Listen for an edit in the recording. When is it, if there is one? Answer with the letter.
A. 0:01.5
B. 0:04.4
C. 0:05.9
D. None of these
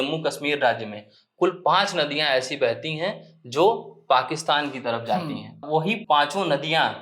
C